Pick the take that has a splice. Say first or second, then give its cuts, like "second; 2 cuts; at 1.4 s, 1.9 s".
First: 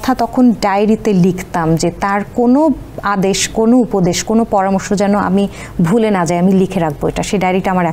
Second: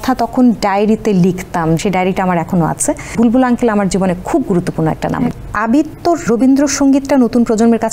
second; 4 cuts; at 1.8 s, 3.1 s, 5.4 s, 6.2 s